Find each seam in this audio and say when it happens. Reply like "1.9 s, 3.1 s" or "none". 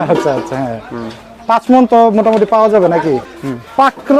3.3 s